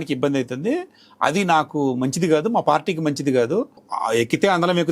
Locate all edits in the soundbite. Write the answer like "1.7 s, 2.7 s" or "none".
3.8 s